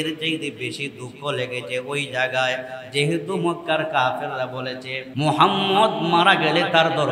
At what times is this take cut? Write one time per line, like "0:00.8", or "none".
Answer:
0:05.0